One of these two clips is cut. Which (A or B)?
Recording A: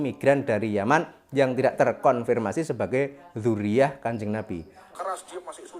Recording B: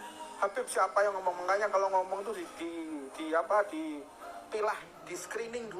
A